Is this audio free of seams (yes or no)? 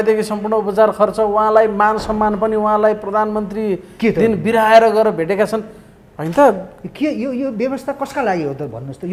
yes